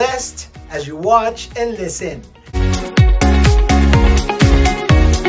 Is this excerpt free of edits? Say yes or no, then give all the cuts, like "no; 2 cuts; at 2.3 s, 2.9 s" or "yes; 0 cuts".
no; 1 cut; at 2.4 s